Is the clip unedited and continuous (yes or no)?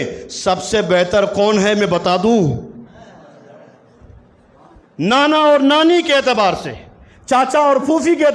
yes